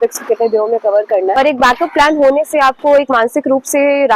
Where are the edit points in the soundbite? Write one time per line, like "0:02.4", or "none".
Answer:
0:01.3